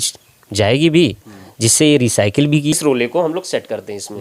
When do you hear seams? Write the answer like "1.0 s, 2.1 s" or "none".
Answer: 2.8 s